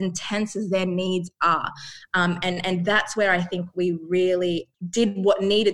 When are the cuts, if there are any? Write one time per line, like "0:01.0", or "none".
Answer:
0:04.7

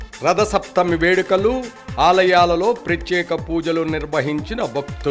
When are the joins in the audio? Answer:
none

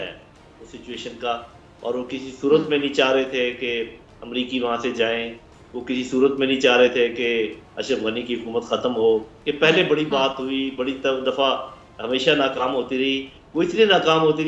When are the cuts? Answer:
0:09.4

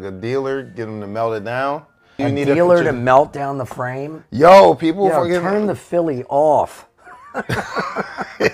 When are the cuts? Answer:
0:02.2

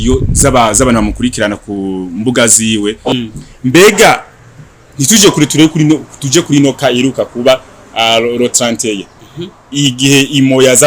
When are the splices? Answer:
0:03.1

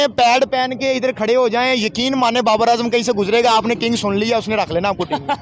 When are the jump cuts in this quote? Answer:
none

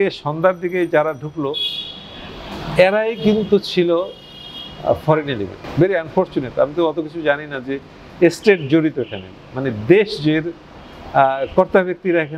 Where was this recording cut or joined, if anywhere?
none

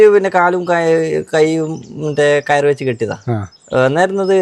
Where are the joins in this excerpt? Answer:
none

